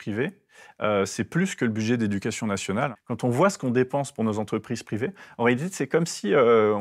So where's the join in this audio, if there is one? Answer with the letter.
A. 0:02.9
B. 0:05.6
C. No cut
A